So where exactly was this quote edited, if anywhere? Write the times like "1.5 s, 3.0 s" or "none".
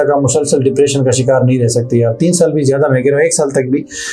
none